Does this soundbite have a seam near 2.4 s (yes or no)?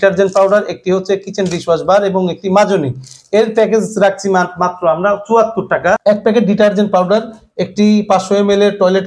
no